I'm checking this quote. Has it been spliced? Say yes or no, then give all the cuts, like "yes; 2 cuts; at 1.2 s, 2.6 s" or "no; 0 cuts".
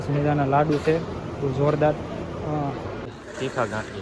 yes; 1 cut; at 3.1 s